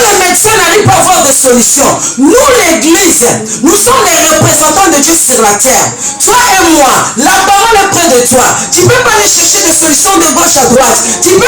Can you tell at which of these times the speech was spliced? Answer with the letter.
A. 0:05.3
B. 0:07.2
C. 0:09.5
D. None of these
D